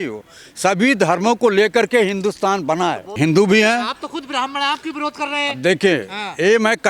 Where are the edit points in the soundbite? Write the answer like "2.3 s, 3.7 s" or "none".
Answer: 3.1 s